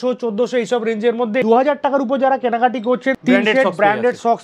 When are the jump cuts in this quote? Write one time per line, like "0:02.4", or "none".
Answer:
0:01.4
0:03.2